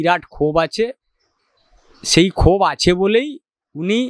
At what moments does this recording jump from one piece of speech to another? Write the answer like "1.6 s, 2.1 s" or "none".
none